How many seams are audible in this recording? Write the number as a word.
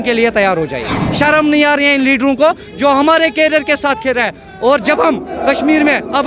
one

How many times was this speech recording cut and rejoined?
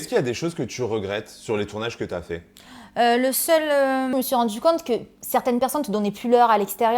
one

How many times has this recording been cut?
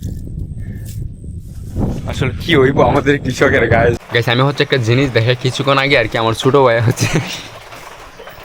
one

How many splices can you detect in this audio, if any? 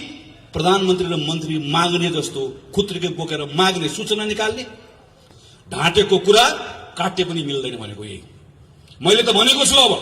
one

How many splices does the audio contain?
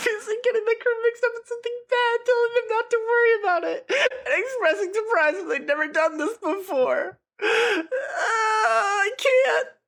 zero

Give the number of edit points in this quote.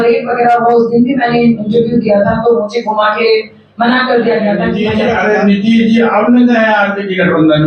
one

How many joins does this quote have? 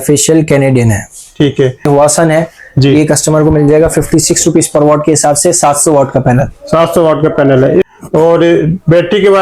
two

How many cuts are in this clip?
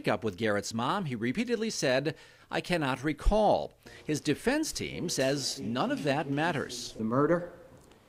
zero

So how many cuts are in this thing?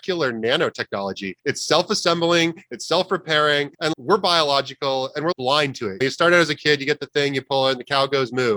two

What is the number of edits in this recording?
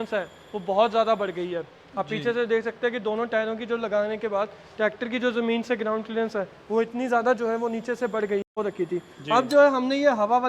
one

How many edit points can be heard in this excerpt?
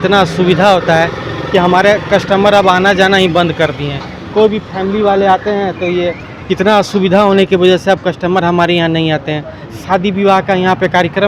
zero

